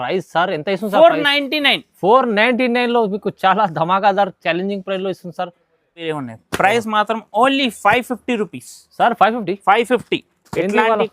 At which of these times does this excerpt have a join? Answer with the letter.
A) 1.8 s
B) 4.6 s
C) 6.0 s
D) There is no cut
C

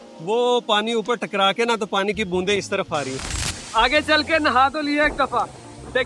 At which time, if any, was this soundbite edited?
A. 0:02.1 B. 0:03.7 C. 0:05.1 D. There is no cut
B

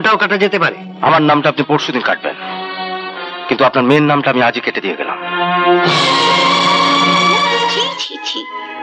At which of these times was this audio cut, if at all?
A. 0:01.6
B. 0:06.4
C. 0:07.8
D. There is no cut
C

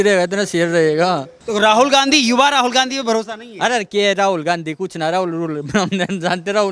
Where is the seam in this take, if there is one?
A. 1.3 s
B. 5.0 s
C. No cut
A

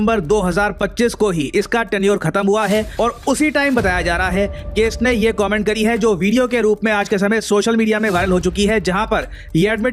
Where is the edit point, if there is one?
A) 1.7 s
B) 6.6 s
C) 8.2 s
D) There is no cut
D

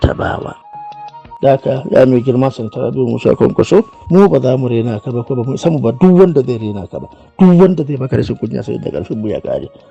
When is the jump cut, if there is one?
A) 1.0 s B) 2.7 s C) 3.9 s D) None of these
A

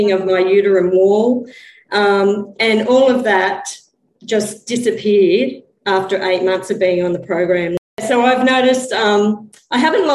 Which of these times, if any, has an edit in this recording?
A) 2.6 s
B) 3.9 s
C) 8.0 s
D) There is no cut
C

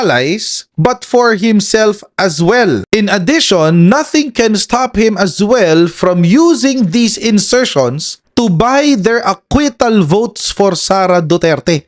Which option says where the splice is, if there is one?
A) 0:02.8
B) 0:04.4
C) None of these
A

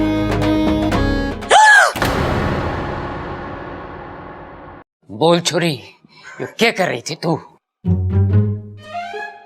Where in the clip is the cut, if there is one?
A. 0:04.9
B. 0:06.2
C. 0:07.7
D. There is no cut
A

